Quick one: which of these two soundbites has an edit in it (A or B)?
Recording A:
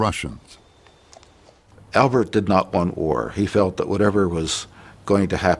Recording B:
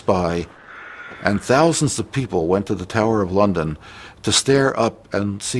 A